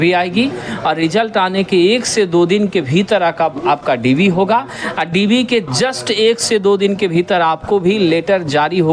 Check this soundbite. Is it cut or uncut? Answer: uncut